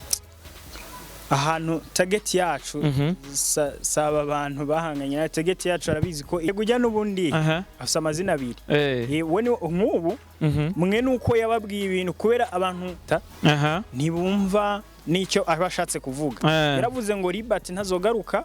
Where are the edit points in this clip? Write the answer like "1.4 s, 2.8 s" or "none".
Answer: 6.5 s